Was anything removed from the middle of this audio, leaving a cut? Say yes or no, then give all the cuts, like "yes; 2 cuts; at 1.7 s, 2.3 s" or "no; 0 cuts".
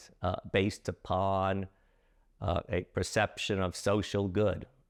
no; 0 cuts